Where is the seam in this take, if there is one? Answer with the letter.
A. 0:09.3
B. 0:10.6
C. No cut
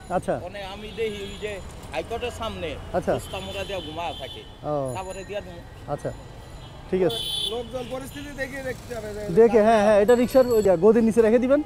B